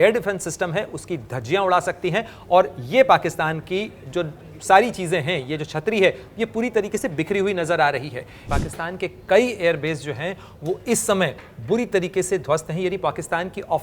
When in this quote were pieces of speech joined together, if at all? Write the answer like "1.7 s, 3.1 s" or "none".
8.4 s